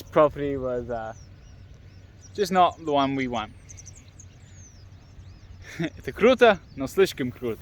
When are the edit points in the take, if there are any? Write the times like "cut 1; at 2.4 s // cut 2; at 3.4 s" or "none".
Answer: none